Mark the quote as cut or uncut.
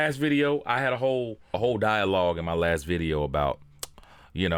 uncut